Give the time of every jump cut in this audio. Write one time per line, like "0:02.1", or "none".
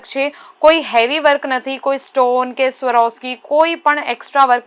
none